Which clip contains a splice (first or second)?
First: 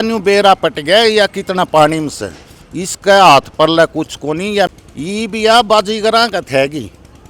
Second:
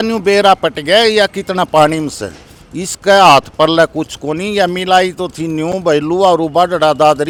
first